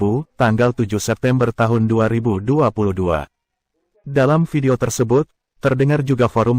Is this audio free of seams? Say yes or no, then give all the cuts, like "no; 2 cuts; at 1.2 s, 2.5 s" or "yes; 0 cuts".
yes; 0 cuts